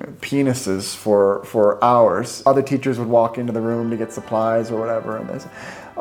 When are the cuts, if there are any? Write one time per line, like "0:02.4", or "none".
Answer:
0:02.4